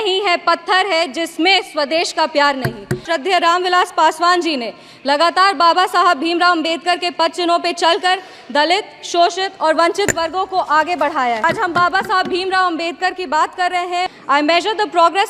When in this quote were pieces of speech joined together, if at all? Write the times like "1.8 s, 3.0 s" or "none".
3.0 s, 11.4 s, 14.1 s